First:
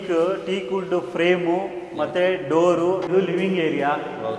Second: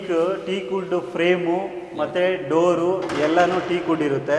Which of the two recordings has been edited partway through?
first; 1 cut; at 3.1 s

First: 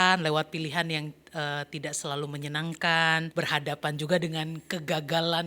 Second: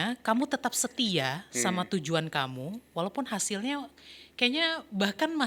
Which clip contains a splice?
first; 1 cut; at 3.3 s

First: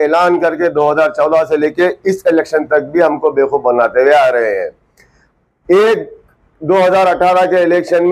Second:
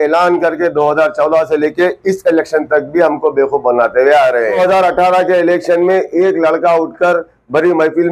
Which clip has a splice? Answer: second; 1 cut; at 4.6 s

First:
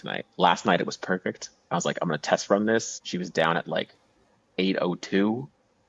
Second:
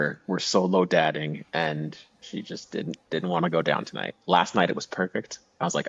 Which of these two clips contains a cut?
first; 1 cut; at 3.0 s

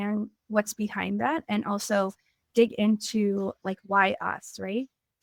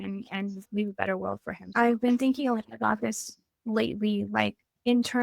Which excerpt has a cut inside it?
second; 1 cut; at 1.7 s

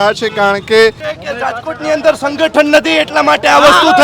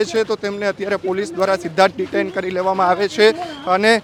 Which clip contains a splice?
first; 1 cut; at 1.1 s

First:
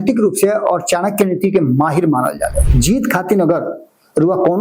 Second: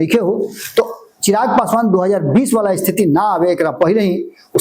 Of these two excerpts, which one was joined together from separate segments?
first; 1 cut; at 2.6 s

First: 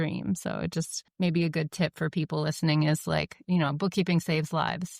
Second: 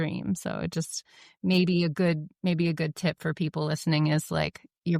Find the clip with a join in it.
first; 2 cuts; at 1.0 s, 3.4 s

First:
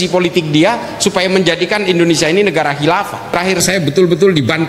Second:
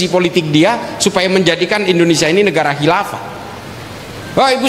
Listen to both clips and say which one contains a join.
first; 1 cut; at 3.3 s

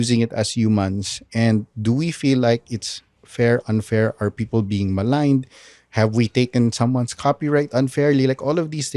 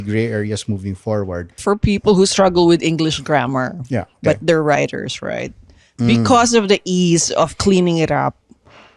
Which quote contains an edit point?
second; 1 cut; at 1.6 s

